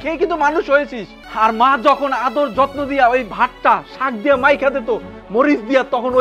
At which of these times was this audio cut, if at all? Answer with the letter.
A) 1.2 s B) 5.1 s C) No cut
A